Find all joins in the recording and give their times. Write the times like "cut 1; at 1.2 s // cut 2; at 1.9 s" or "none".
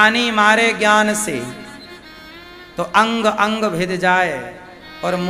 none